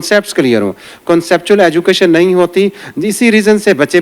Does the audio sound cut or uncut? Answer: uncut